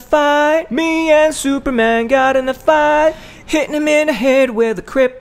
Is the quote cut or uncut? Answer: uncut